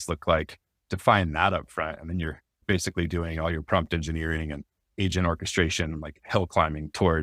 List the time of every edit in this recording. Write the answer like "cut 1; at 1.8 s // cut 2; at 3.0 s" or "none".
none